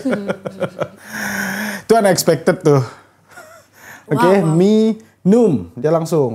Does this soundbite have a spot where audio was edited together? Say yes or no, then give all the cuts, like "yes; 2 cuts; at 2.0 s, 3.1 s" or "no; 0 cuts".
no; 0 cuts